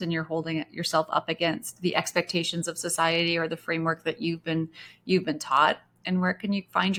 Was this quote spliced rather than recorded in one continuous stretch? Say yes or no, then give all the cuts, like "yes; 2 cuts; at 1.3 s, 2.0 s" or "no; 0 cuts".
no; 0 cuts